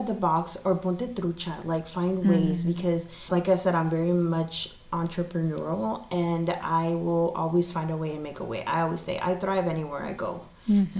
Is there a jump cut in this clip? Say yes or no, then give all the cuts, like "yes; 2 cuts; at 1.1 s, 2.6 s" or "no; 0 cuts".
yes; 1 cut; at 3.2 s